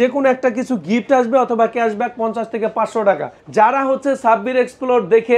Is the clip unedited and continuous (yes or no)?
no